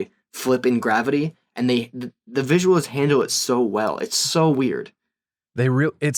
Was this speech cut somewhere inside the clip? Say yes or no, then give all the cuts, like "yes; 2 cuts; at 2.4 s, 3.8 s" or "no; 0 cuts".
no; 0 cuts